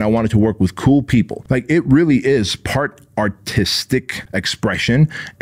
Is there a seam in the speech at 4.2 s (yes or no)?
yes